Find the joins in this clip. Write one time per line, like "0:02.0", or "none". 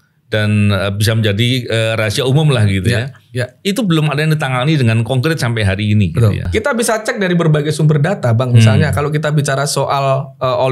0:06.4